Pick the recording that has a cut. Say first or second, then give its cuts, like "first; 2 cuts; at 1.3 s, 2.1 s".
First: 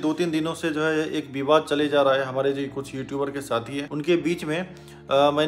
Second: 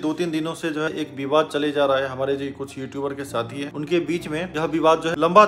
second; 2 cuts; at 0.9 s, 4.5 s